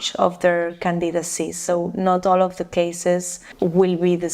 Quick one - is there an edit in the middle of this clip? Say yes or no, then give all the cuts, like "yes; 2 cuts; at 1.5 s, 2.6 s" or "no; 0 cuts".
yes; 2 cuts; at 1.6 s, 3.4 s